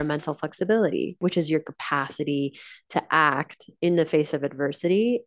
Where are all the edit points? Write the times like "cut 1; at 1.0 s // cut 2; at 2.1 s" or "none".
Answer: cut 1; at 1.2 s

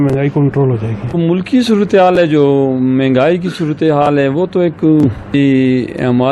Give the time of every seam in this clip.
cut 1; at 1.2 s // cut 2; at 5.4 s

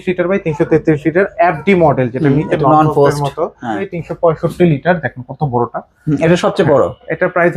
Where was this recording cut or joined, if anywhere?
cut 1; at 3.9 s

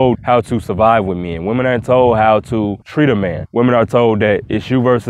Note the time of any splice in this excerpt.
cut 1; at 3.4 s

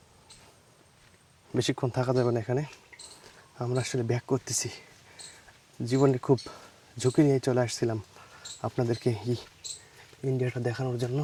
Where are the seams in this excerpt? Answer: none

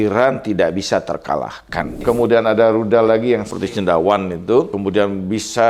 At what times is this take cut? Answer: cut 1; at 2.0 s // cut 2; at 3.5 s // cut 3; at 4.8 s

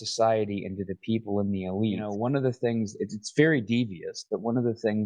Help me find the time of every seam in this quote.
cut 1; at 2.1 s

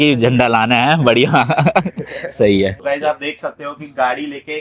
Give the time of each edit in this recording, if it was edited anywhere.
cut 1; at 2.8 s

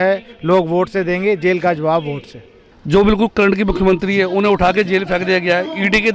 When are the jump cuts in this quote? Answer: none

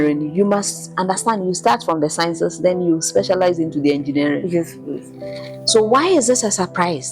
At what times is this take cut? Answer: none

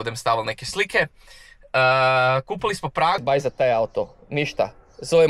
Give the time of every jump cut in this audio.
cut 1; at 3.2 s

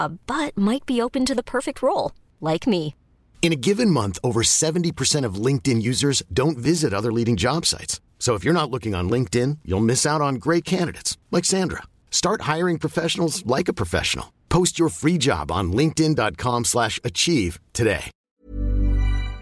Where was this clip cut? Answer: cut 1; at 18.1 s

